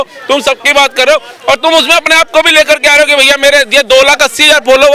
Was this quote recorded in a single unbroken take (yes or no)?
yes